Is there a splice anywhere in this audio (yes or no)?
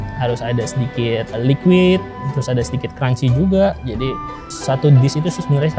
yes